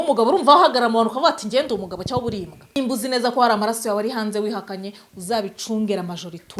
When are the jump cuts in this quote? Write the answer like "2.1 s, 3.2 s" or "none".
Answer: 2.8 s